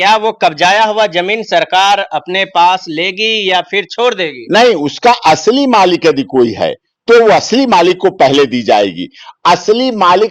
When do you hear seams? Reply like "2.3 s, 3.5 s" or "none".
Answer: none